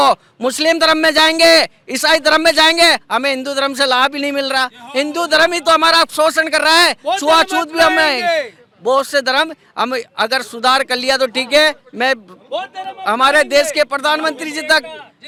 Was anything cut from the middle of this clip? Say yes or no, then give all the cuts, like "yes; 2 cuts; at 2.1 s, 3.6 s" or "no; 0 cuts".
no; 0 cuts